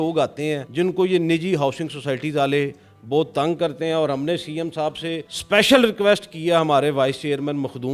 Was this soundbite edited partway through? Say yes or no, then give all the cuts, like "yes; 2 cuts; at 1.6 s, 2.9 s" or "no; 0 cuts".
no; 0 cuts